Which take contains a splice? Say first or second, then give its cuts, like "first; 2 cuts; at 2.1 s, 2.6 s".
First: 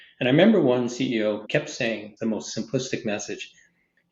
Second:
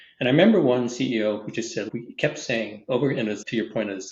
first; 1 cut; at 2.0 s